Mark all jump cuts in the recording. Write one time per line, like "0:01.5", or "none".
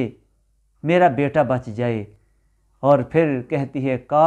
none